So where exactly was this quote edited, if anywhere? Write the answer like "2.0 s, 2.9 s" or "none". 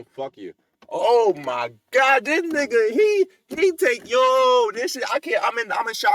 none